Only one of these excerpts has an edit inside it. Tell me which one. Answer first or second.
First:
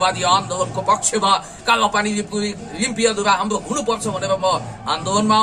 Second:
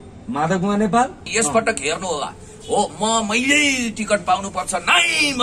second